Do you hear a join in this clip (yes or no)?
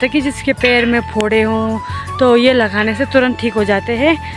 no